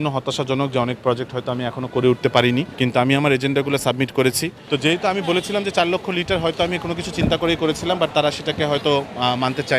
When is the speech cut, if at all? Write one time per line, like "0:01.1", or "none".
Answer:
0:02.7
0:04.5